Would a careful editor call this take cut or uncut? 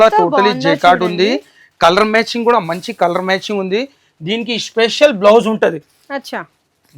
uncut